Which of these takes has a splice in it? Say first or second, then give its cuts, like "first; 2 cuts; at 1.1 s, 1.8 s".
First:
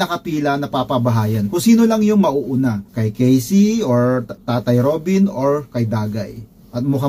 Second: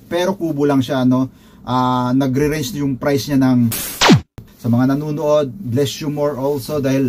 second; 1 cut; at 4.0 s